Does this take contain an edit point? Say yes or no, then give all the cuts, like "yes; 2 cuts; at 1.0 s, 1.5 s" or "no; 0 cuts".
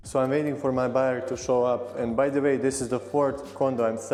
no; 0 cuts